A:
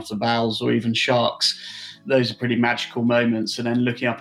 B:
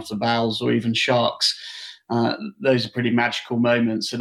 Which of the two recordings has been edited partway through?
A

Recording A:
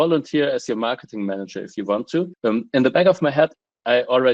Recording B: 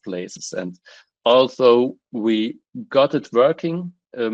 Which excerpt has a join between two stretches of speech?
A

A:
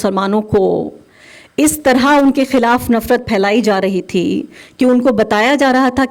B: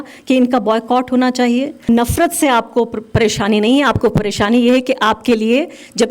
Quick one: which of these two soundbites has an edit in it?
B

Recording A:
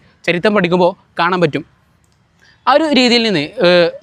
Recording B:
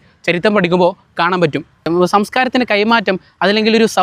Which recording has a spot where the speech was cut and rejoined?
B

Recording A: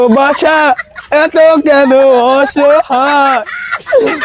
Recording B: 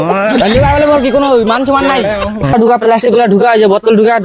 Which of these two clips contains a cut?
B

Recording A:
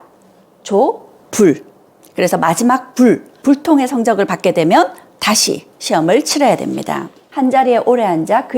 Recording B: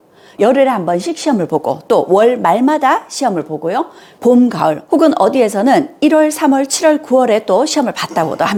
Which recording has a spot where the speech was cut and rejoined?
A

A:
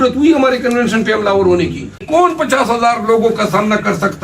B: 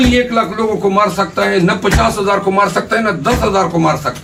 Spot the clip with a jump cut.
A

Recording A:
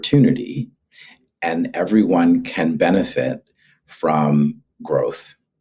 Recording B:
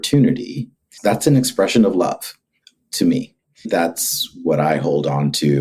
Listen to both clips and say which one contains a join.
B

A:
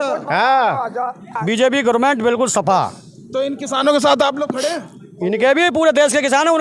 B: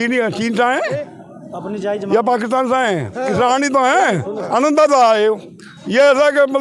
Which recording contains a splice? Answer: A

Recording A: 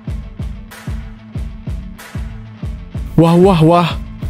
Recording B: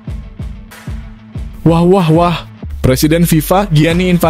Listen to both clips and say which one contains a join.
B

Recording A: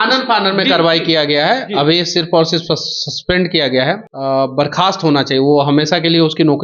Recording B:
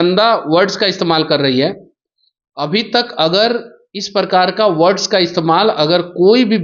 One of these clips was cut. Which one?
A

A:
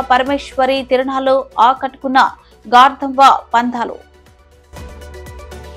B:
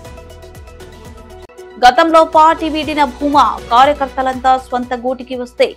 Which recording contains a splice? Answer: B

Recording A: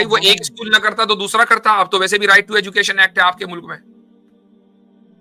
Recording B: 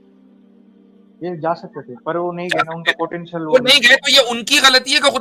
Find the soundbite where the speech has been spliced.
B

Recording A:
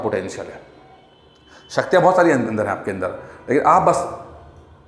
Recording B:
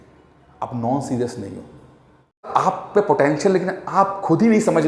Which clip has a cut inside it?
B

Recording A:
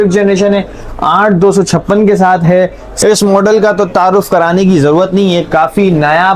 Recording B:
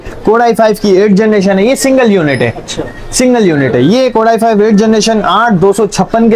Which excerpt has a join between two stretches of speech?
A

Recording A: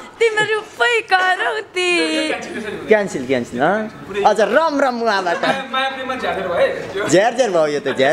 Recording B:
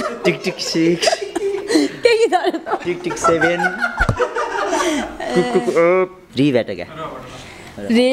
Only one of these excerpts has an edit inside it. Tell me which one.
B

